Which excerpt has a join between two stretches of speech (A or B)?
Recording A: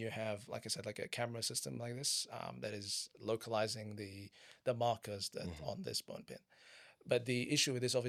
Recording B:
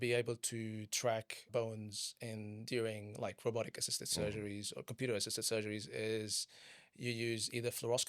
B